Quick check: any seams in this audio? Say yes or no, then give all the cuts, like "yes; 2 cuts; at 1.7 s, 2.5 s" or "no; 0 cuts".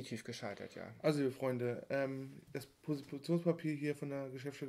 no; 0 cuts